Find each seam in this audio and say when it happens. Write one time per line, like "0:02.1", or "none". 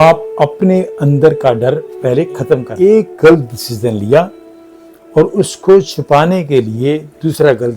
0:02.7